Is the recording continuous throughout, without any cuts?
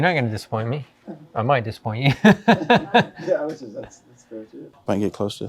yes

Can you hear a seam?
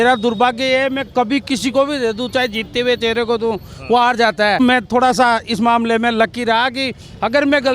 yes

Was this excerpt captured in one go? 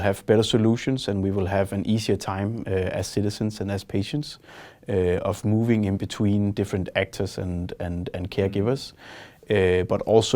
yes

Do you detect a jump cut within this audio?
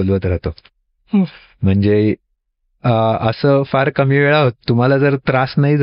no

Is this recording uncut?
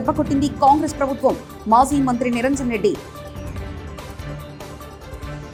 yes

